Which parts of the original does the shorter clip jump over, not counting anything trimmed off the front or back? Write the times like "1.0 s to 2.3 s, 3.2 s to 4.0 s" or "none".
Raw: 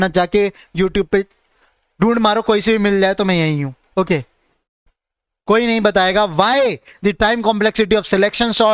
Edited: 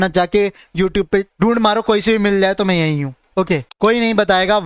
1.3 s to 1.9 s, 4.3 s to 5.4 s